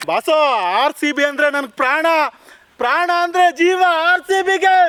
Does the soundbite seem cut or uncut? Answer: uncut